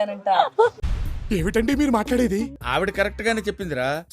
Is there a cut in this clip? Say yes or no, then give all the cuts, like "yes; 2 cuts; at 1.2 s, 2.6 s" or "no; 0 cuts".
no; 0 cuts